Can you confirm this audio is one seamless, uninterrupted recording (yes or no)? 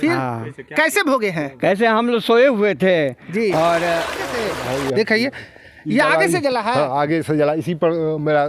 no